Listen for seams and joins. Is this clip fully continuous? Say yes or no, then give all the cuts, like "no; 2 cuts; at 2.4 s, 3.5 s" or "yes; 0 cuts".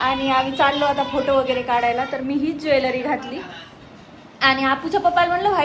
yes; 0 cuts